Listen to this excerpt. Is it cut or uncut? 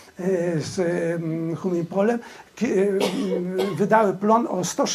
uncut